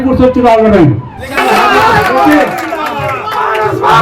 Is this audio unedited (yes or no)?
no